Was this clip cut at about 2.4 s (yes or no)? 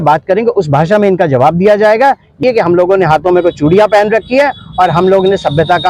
yes